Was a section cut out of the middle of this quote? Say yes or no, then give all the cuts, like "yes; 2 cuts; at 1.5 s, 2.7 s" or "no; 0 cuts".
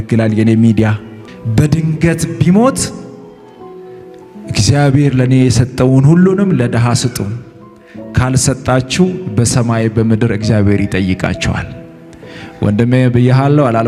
no; 0 cuts